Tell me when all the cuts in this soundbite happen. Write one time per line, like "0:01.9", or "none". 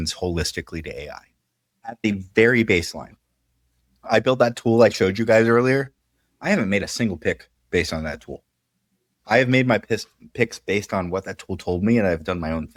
none